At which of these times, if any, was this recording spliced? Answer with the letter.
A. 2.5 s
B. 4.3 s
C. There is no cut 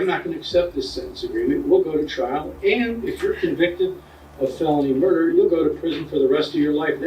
A